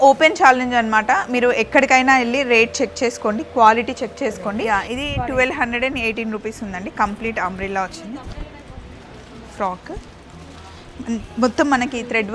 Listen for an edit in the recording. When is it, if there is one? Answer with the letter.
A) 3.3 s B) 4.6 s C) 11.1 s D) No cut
B